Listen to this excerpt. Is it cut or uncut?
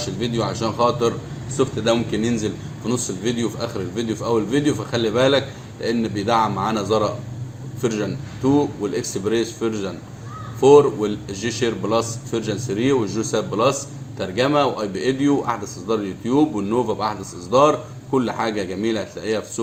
uncut